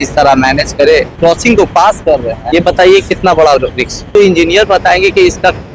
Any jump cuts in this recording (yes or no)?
yes